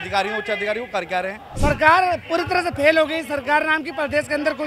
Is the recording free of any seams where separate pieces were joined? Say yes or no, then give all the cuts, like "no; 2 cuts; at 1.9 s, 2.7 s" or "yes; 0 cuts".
no; 1 cut; at 1.4 s